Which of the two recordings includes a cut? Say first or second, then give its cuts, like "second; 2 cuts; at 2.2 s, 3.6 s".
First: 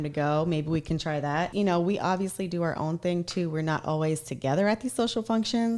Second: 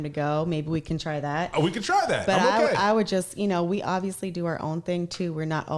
first; 1 cut; at 1.5 s